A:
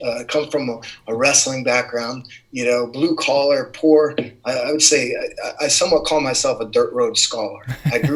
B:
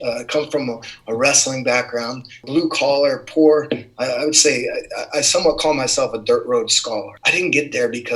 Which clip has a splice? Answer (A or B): B